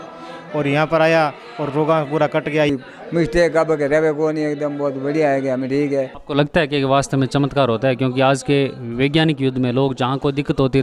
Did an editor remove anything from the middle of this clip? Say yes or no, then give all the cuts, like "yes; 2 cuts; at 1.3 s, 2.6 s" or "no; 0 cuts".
yes; 2 cuts; at 2.7 s, 6.2 s